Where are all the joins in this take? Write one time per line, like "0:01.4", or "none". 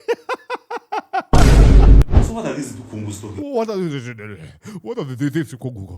0:02.0